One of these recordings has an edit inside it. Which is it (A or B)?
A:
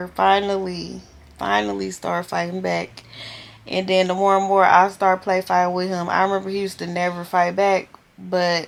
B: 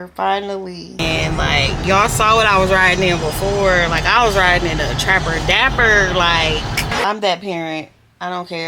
B